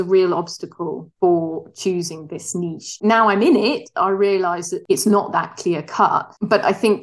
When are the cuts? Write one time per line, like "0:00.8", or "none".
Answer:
0:02.9